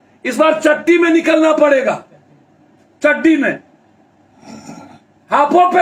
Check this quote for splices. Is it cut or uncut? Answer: uncut